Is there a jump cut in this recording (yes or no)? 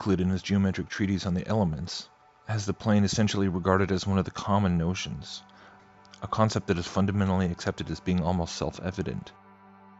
yes